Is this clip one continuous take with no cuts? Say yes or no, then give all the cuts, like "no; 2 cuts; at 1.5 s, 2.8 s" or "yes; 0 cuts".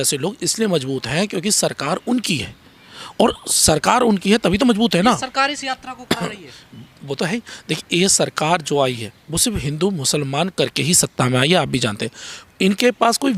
yes; 0 cuts